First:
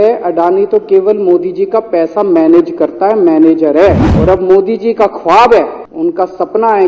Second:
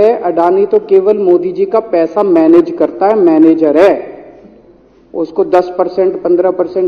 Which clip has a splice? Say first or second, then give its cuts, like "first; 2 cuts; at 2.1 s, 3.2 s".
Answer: first; 2 cuts; at 4.1 s, 5.8 s